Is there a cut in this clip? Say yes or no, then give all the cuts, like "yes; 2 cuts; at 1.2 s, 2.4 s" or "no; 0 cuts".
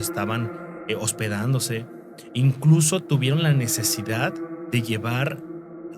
no; 0 cuts